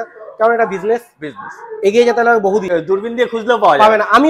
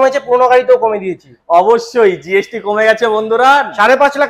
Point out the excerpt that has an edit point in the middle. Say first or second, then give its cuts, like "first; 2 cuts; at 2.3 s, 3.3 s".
first; 1 cut; at 2.7 s